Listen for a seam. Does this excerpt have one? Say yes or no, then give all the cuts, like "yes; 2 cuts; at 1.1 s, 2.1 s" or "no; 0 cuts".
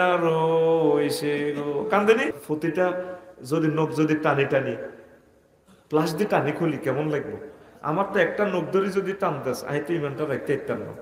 yes; 1 cut; at 2.4 s